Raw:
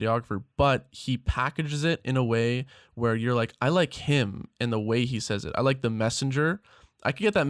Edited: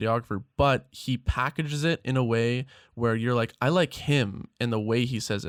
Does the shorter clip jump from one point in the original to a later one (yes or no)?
no